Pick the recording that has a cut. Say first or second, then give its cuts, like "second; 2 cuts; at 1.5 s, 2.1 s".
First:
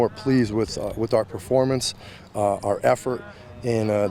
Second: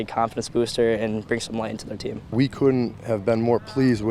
second; 1 cut; at 2.3 s